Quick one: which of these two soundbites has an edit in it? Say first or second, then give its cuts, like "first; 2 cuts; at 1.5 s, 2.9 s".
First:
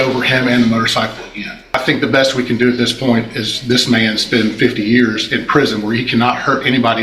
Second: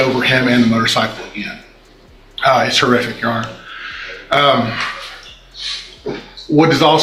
first; 1 cut; at 1.7 s